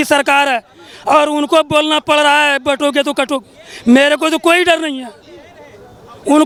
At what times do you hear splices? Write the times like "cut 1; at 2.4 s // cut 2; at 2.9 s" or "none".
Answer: none